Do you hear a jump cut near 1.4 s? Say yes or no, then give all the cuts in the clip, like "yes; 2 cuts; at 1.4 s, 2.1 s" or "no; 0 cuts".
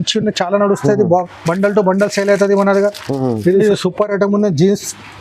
no; 1 cut; at 3.6 s